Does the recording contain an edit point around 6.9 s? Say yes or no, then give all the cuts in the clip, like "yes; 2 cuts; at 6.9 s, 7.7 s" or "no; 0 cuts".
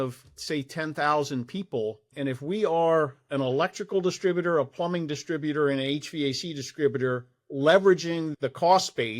no; 2 cuts; at 2.1 s, 8.3 s